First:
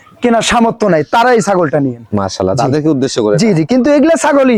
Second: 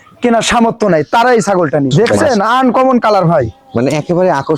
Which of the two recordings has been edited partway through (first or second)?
second